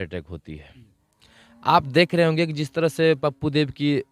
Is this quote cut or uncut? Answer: uncut